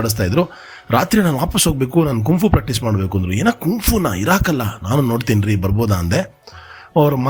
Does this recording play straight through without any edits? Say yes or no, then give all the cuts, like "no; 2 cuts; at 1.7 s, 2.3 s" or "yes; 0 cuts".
yes; 0 cuts